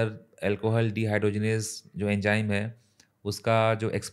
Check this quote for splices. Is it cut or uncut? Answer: uncut